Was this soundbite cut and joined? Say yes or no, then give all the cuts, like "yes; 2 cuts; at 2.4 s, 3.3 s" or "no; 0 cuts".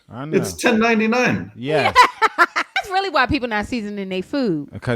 yes; 1 cut; at 2.7 s